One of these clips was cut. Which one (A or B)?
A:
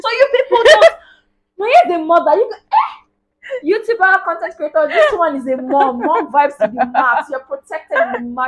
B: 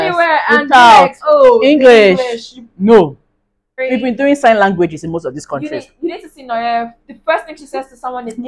B